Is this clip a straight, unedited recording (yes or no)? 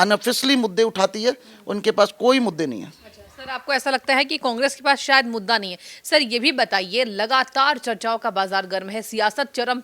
yes